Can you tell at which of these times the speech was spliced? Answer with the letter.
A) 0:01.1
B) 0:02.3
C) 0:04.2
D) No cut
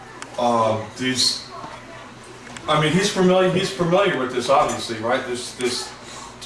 D